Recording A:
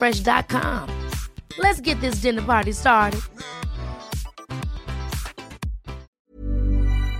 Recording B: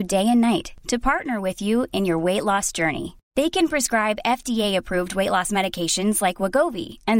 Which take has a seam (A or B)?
A